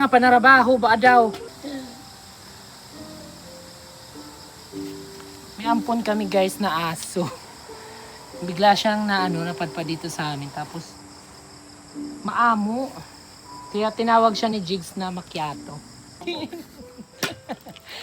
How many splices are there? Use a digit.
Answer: 0